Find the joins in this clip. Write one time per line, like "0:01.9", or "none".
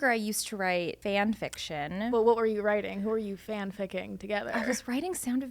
0:01.0
0:02.1